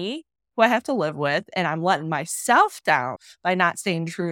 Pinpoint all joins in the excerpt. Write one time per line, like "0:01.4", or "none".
0:03.3